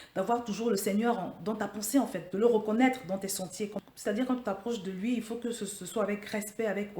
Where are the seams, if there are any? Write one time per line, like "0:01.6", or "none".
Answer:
0:03.8